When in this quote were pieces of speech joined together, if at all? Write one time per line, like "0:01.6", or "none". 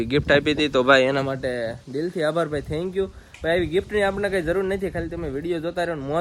none